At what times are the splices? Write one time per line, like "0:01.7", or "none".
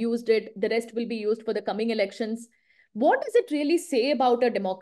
none